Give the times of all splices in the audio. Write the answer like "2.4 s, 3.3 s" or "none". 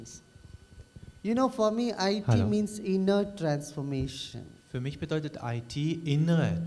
3.6 s